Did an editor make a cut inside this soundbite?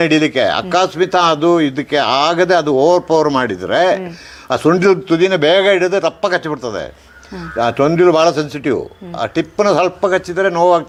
no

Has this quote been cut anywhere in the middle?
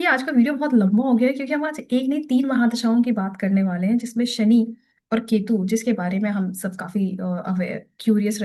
no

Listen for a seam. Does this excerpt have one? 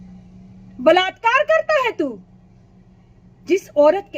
no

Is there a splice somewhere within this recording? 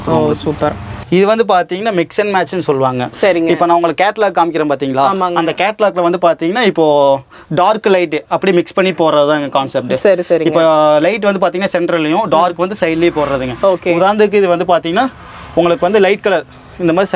no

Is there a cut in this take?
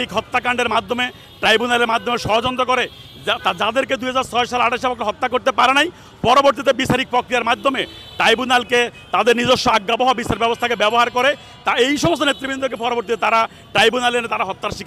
no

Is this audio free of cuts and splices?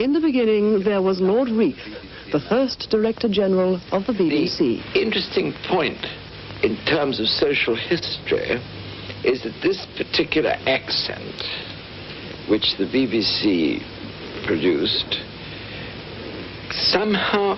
yes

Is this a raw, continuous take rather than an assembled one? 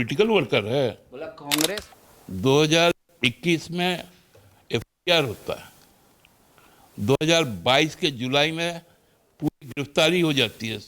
no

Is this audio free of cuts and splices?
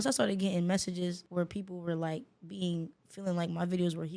no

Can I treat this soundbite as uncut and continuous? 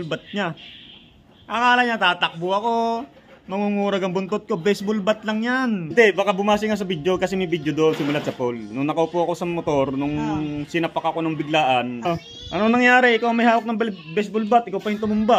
no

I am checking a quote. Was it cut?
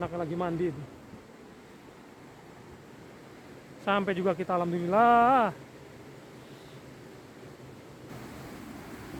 yes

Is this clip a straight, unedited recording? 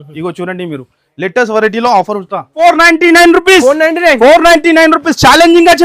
no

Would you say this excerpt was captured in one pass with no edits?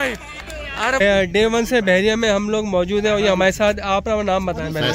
no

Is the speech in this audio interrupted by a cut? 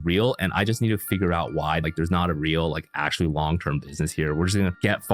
yes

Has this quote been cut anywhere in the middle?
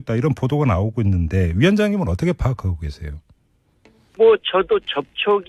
no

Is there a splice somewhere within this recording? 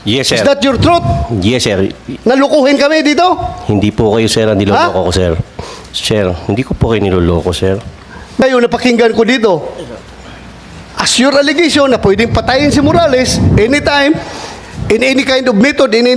yes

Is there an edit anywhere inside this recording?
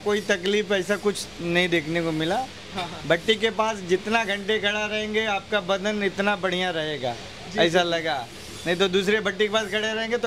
no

